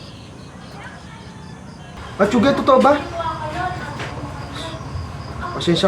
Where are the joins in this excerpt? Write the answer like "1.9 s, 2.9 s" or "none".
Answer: 1.9 s